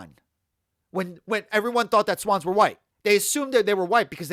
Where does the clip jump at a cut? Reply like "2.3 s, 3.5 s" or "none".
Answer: 2.9 s